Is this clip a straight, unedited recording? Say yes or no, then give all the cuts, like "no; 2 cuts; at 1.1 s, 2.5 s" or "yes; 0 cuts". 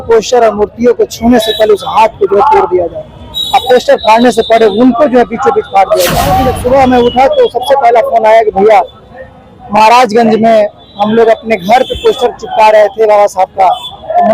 no; 1 cut; at 6.4 s